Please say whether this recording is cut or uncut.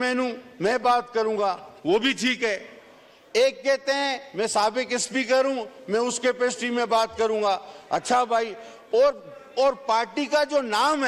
uncut